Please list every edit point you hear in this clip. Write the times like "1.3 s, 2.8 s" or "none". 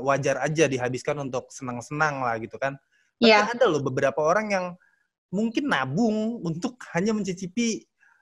none